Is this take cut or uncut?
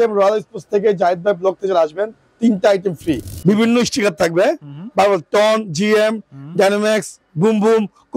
cut